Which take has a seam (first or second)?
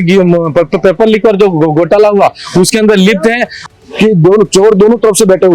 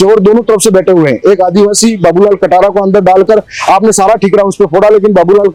first